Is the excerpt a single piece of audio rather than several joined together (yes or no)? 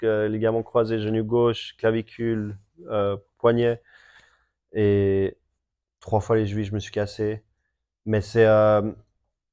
yes